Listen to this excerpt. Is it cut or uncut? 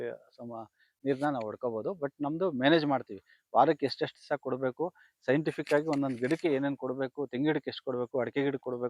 uncut